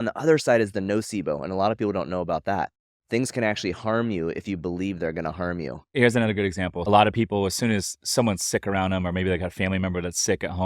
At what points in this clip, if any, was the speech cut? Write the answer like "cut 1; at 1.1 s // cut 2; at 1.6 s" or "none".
cut 1; at 5.9 s // cut 2; at 6.9 s